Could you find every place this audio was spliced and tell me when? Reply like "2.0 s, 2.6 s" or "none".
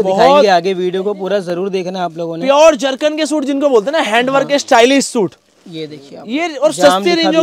none